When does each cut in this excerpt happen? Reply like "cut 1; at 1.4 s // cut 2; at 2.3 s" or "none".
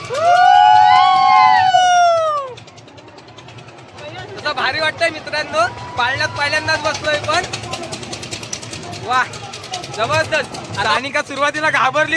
cut 1; at 10.8 s